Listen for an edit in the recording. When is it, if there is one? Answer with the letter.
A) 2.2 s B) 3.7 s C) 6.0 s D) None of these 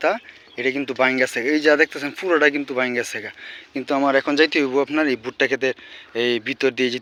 D